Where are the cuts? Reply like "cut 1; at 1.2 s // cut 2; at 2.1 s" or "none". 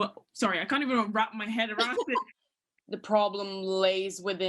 cut 1; at 2.7 s